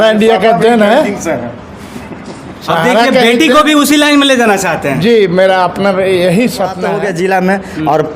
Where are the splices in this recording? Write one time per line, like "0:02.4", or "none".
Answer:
0:06.8